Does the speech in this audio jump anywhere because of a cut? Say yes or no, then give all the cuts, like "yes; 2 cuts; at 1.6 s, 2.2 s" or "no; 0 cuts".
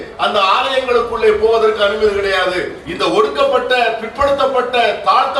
yes; 1 cut; at 2.8 s